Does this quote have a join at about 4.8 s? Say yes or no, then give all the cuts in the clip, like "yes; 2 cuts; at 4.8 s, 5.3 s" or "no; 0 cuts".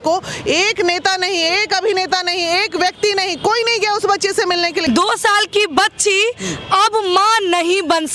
yes; 1 cut; at 4.8 s